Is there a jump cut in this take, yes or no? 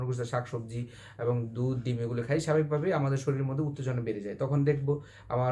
no